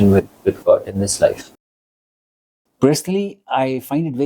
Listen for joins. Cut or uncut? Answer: cut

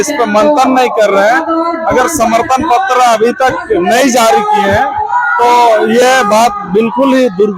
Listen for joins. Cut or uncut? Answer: uncut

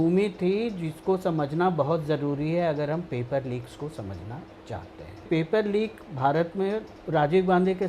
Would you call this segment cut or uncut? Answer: cut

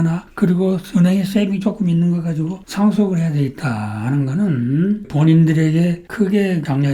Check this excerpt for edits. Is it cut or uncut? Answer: uncut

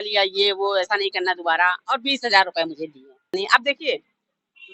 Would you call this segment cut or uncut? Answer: cut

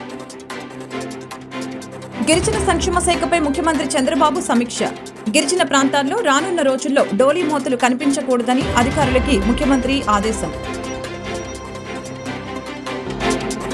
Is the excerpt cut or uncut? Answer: cut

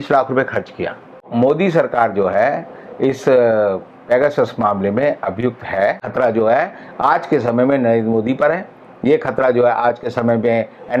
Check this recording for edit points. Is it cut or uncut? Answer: cut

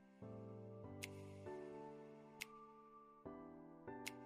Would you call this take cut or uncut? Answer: cut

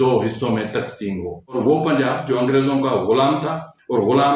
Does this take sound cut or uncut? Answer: cut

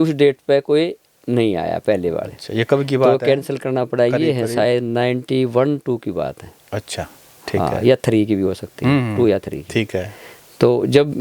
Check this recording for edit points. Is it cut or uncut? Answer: uncut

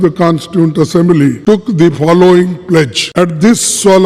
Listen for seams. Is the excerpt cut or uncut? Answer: cut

